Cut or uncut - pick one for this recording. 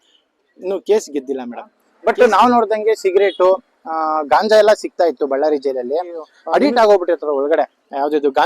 cut